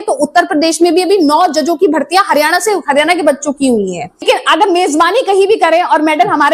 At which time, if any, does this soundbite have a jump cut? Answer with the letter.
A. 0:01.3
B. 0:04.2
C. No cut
B